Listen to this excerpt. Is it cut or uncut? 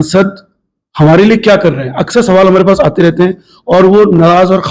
uncut